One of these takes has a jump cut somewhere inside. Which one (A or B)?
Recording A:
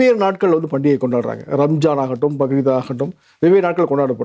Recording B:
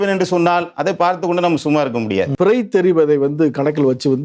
B